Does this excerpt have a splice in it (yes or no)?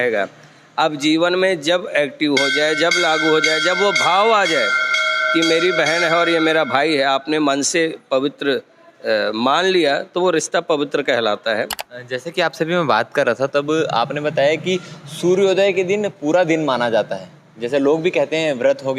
yes